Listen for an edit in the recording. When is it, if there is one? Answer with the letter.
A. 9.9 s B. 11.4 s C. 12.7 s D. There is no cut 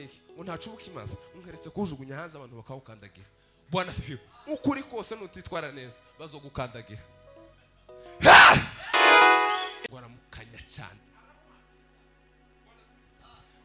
A